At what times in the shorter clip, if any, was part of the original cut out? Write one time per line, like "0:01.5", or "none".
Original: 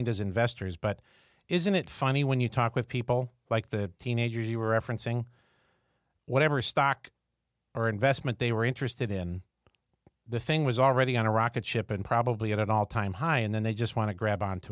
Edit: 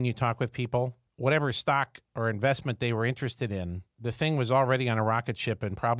0:01.0
0:02.0
0:03.8